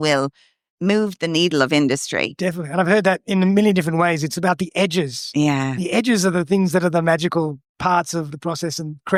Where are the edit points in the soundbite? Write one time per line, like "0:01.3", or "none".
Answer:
none

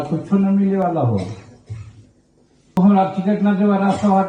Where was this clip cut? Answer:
0:02.8

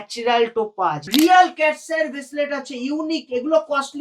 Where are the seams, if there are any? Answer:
0:01.0

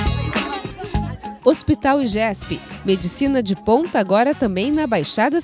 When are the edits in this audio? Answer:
0:01.1

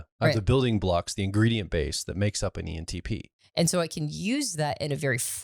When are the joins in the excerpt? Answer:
0:03.3

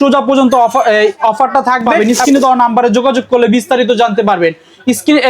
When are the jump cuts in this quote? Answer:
0:01.9

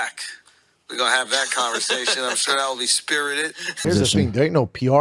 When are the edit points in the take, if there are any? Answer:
0:03.8

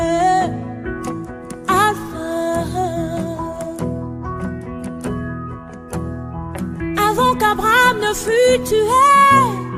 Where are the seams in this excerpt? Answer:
none

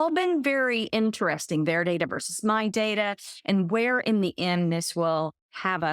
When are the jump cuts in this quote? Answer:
none

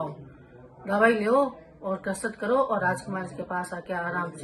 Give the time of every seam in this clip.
none

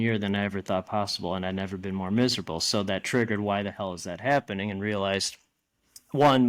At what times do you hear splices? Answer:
none

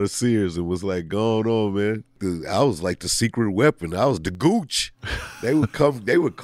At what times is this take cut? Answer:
0:02.2

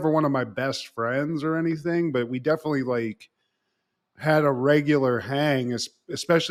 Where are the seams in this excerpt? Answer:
none

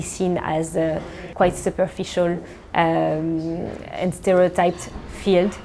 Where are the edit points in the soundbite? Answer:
0:01.2

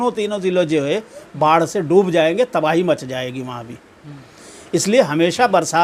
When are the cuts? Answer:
none

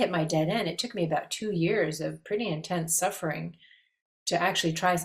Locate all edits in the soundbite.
none

